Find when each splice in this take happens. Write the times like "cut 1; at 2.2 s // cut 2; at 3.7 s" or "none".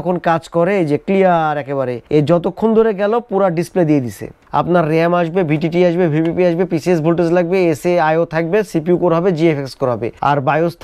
cut 1; at 4.4 s